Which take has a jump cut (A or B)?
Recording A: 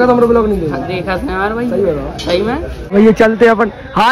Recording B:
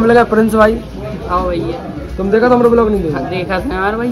A